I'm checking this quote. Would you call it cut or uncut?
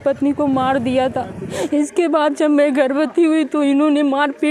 cut